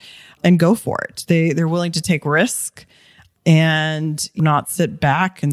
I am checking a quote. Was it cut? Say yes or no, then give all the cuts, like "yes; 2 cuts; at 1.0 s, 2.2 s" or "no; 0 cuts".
yes; 1 cut; at 4.4 s